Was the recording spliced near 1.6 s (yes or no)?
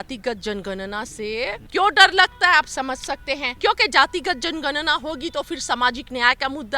yes